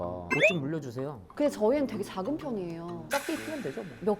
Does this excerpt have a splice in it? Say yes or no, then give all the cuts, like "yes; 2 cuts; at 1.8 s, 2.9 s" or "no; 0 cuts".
yes; 2 cuts; at 1.2 s, 3.0 s